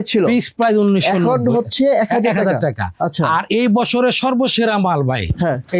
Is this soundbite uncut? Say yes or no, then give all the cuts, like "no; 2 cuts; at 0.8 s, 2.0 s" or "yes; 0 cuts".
yes; 0 cuts